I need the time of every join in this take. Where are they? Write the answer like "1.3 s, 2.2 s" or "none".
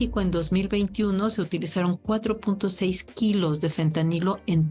none

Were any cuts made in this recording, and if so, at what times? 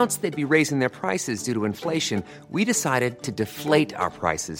none

